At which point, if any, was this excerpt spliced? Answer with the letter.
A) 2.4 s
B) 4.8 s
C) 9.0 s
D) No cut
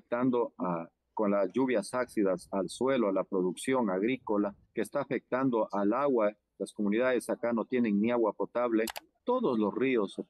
C